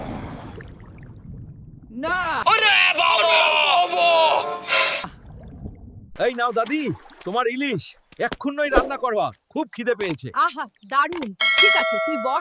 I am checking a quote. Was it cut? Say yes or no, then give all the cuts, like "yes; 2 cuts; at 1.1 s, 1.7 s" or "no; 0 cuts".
no; 0 cuts